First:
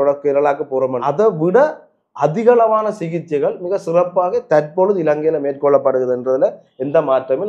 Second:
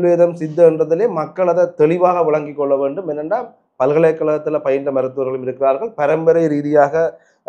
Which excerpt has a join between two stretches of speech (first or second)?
first